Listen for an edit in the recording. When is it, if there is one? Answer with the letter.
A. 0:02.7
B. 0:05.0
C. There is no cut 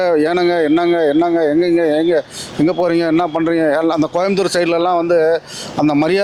C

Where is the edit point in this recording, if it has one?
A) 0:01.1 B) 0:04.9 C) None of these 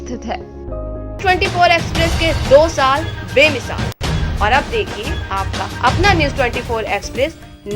A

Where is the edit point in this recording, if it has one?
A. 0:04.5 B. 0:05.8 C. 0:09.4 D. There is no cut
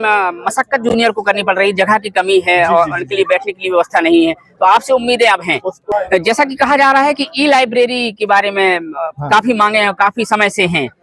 B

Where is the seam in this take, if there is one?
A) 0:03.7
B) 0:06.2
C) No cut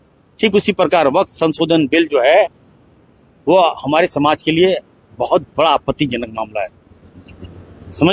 C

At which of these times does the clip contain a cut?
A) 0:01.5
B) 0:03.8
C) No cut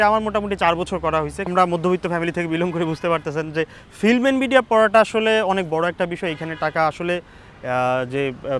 A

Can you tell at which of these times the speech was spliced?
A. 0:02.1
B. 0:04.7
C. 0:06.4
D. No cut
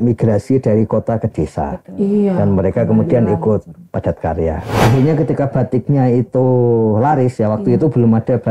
B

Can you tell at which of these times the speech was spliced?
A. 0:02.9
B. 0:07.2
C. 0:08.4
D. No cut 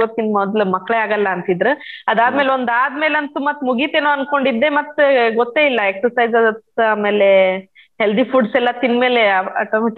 D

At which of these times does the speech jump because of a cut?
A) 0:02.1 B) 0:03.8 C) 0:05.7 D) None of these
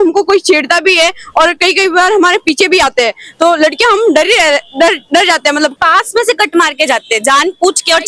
C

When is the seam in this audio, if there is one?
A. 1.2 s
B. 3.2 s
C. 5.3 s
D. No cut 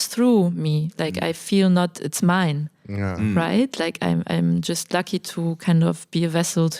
D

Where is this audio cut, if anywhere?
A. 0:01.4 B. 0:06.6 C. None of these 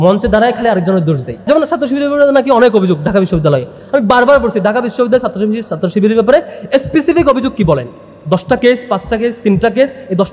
A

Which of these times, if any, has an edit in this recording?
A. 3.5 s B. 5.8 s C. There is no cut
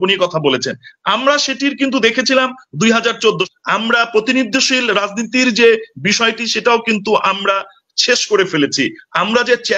A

